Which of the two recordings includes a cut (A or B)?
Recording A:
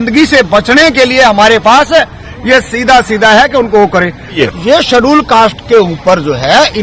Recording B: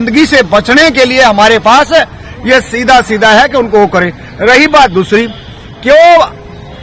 A